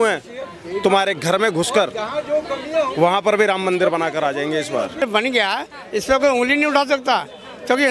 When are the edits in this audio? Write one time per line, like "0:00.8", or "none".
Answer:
0:05.0